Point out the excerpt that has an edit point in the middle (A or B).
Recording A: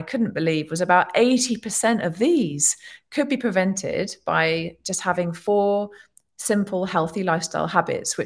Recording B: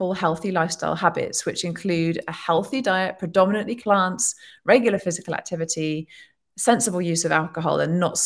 B